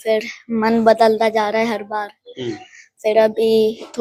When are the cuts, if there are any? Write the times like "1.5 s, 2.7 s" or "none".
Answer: none